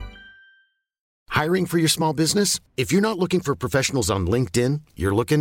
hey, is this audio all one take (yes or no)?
no